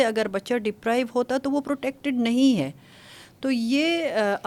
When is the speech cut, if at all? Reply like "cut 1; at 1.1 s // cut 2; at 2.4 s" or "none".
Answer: none